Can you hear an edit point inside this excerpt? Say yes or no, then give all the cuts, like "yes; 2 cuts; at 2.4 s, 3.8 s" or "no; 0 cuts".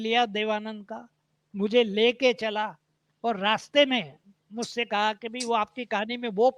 no; 0 cuts